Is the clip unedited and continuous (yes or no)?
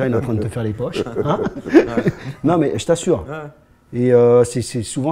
yes